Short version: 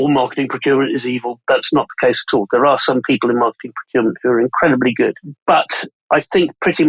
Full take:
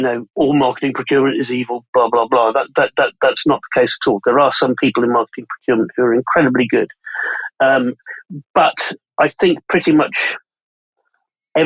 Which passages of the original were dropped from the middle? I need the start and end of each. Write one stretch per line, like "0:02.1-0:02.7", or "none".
0:01.9-0:03.1
0:07.0-0:08.4